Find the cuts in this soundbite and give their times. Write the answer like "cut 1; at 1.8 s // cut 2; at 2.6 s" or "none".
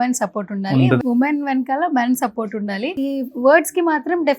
cut 1; at 1.0 s // cut 2; at 2.9 s